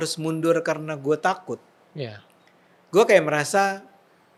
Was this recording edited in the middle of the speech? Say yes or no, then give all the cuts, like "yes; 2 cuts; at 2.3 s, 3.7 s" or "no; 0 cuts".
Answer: no; 0 cuts